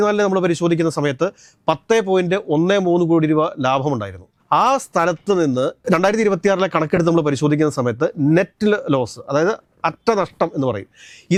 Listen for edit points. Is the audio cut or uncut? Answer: uncut